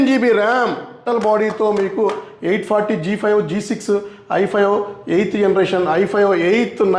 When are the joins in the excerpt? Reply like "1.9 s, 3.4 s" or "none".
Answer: 1.0 s